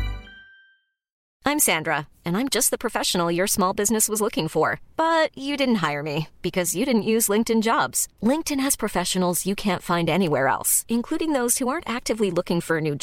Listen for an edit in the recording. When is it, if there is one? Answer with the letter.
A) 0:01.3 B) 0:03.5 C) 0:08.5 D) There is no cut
A